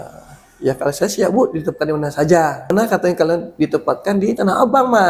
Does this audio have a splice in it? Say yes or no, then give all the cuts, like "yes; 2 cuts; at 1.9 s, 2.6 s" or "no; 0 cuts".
yes; 1 cut; at 2.7 s